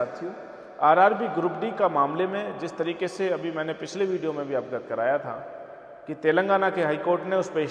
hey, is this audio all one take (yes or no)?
yes